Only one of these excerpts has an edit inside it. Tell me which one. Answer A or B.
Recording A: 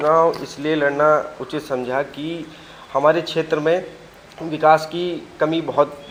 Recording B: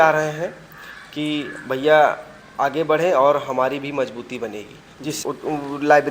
B